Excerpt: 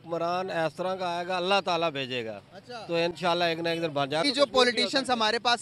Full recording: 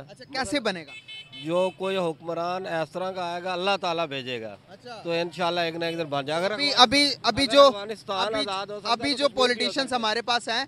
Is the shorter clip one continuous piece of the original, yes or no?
no